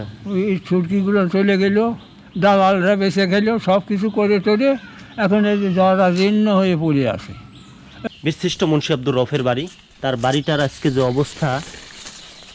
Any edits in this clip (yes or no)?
yes